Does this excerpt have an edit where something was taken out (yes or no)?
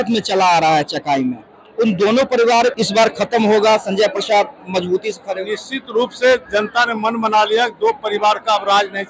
no